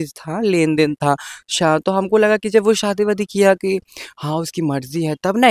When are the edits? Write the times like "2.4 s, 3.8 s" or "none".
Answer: none